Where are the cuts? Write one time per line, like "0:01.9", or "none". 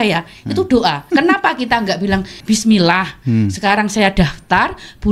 0:01.1
0:02.3